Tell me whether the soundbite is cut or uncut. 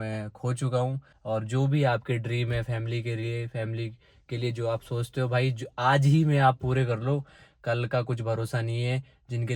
cut